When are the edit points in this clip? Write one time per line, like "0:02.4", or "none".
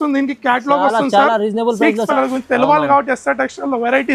0:02.1